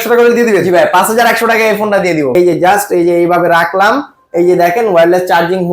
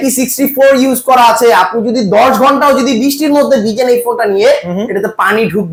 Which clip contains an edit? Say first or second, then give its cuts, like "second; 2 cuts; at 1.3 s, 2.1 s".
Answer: first; 1 cut; at 2.3 s